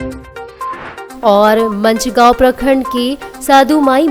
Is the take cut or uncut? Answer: uncut